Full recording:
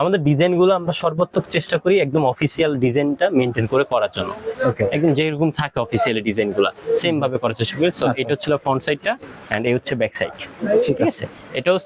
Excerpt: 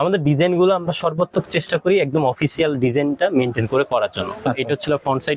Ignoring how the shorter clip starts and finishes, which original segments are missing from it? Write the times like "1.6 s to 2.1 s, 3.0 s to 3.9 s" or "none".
4.5 s to 8.1 s